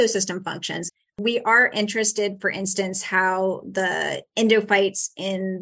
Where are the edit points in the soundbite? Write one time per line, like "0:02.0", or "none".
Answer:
0:00.9